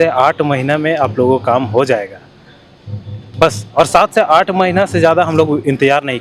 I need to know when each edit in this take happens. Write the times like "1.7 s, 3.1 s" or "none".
none